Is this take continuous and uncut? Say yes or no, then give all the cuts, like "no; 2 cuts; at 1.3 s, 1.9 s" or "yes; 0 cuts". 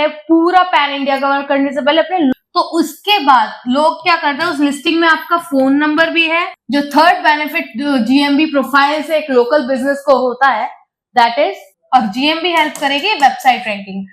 no; 3 cuts; at 2.3 s, 6.6 s, 11.7 s